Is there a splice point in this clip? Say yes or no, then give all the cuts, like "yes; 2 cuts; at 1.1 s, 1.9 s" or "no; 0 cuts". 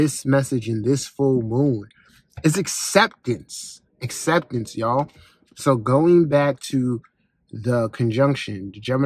no; 0 cuts